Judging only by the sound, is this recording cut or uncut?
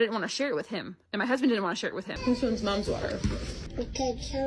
cut